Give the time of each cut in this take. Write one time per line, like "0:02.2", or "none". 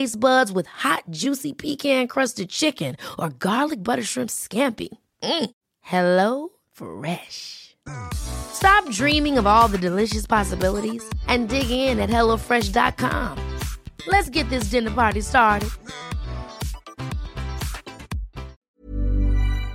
0:18.6